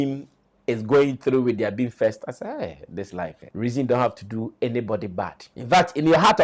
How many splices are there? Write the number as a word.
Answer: two